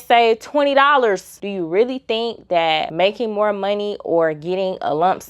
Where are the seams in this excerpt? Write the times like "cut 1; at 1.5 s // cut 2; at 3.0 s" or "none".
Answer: cut 1; at 1.4 s